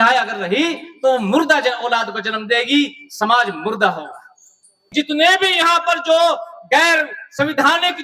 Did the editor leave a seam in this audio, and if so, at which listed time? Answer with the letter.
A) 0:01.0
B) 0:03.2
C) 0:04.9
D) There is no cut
C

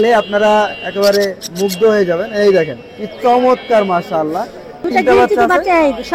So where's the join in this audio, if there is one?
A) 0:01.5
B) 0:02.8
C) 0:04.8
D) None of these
C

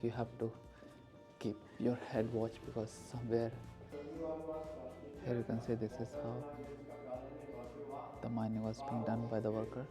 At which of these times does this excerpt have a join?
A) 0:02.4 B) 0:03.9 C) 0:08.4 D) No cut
B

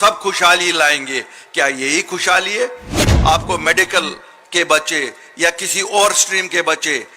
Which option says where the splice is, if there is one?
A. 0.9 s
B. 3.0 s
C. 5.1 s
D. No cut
B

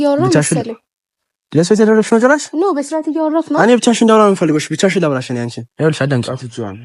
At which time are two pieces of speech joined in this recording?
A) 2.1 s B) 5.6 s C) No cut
B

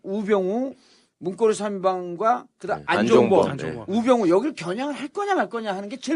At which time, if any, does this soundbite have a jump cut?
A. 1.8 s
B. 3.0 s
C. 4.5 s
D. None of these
A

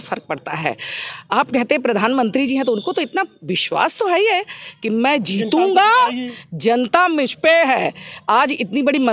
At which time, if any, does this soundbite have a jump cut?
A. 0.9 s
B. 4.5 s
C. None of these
C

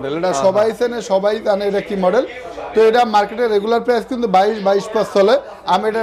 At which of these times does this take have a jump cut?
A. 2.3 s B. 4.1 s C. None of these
C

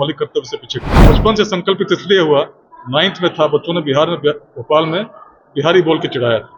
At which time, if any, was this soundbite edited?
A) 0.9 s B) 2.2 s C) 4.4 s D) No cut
A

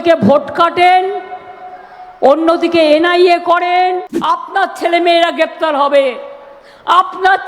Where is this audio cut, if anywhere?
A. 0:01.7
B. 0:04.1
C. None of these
B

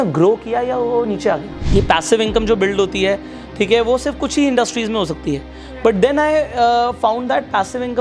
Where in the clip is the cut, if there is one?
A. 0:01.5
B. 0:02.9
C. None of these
A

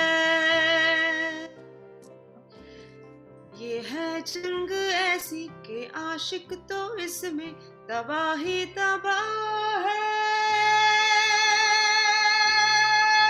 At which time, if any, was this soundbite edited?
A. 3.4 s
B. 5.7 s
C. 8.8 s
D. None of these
D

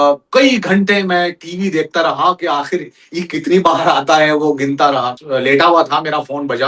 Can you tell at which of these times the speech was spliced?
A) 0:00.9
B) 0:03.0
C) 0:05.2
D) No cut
C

